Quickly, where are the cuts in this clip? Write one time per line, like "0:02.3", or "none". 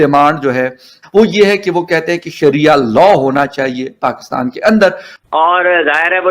0:00.9
0:05.1

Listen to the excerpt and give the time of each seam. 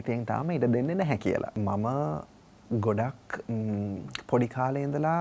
0:01.5

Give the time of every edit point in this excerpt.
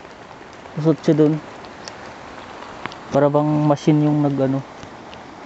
none

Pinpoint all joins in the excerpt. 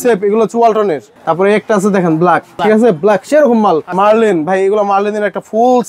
0:01.1
0:02.5
0:03.9

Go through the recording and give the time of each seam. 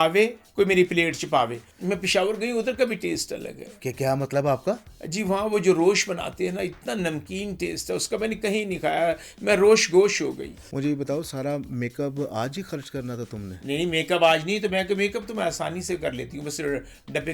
0:01.7
0:10.6

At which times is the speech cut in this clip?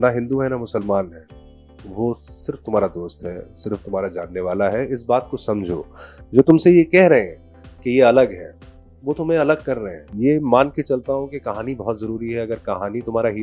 0:10.0

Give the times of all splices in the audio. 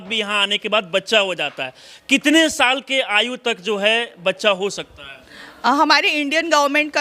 none

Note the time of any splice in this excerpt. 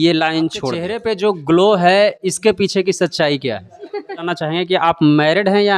0:01.0
0:04.3

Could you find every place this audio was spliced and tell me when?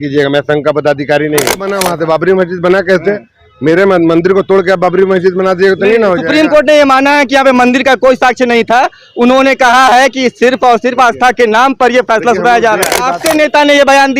0:01.7
0:13.2

